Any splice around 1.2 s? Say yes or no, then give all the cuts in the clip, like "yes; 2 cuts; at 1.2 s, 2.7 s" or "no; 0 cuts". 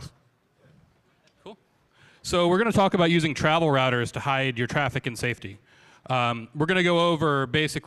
yes; 1 cut; at 1.2 s